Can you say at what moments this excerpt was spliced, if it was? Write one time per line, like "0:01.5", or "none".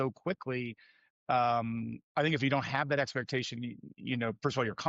none